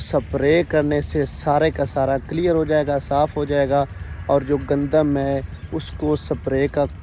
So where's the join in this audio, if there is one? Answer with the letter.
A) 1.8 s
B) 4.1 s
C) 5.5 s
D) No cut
D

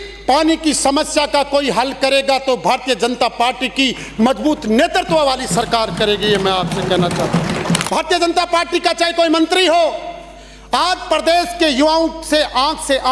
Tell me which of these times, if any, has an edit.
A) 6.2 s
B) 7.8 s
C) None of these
B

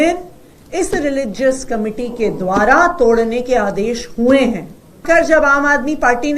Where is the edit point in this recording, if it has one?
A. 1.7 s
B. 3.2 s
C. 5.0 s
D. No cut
C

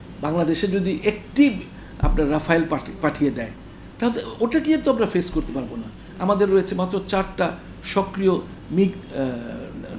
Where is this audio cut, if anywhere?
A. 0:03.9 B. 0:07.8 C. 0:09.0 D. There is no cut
D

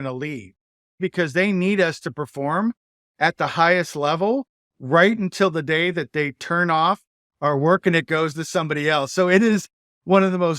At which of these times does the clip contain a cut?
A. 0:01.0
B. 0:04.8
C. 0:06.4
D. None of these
A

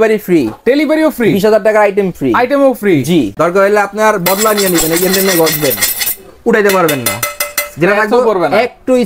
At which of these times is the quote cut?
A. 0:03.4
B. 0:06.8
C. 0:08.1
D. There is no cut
A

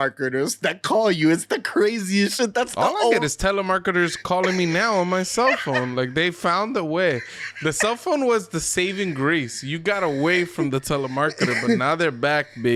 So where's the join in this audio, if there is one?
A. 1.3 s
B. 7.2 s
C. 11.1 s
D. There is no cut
D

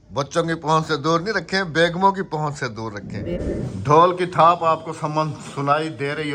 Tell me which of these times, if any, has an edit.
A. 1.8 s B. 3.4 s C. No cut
B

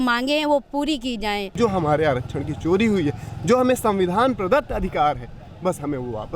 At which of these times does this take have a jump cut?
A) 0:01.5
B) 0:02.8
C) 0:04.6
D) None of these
A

